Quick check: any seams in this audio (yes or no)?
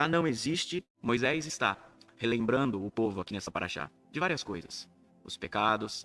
yes